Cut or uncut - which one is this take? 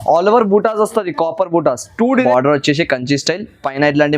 cut